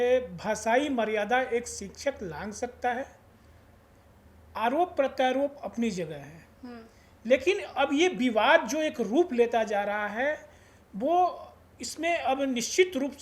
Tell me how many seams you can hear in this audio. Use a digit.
0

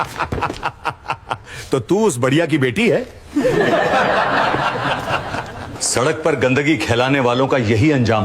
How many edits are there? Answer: 1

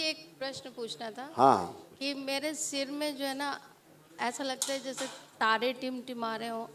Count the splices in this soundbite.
0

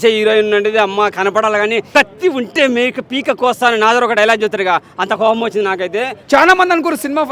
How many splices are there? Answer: 2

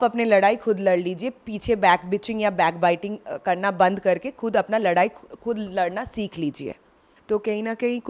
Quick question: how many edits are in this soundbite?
1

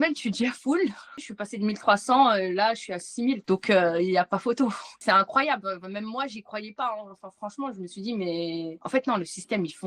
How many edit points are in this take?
2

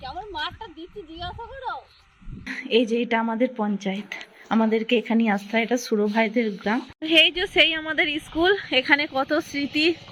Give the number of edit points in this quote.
2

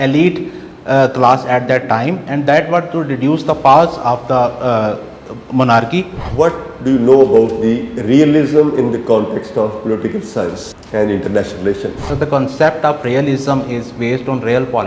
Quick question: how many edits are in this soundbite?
3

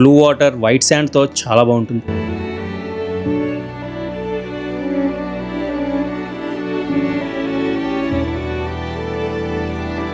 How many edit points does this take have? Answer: 0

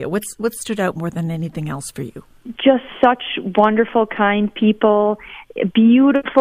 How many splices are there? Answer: 0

